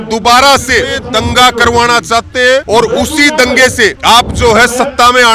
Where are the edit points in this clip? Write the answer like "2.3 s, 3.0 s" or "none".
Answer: 1.0 s, 2.6 s, 4.0 s